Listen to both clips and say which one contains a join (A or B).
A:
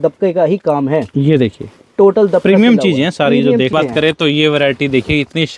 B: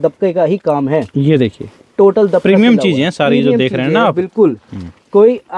A